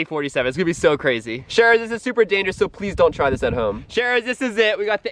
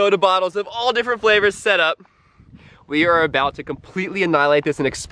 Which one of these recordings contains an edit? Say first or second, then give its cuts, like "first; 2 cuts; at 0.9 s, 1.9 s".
first; 1 cut; at 3.8 s